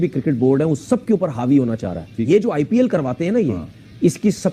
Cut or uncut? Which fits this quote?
uncut